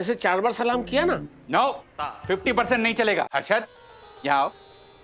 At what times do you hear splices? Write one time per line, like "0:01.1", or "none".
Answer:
0:03.3